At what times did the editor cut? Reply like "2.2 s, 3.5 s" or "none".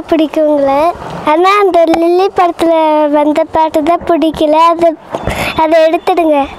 1.1 s